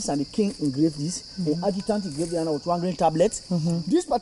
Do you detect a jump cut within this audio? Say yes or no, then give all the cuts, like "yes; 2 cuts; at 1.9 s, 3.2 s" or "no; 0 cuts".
no; 0 cuts